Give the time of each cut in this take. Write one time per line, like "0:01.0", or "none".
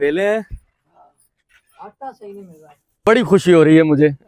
0:03.0